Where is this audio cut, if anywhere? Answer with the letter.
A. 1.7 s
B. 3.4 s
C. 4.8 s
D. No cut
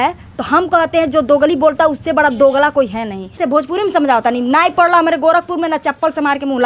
B